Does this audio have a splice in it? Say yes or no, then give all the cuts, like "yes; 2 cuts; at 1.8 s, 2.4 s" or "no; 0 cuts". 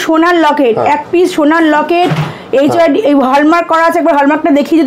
no; 0 cuts